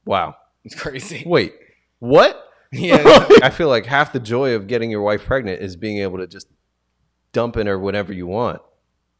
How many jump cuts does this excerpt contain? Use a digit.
1